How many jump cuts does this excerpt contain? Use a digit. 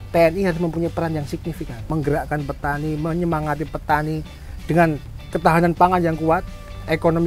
2